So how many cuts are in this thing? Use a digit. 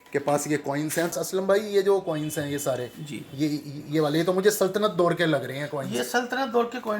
1